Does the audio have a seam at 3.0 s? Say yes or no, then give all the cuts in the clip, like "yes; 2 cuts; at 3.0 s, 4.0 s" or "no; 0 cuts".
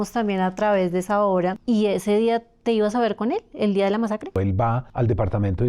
no; 2 cuts; at 1.6 s, 4.5 s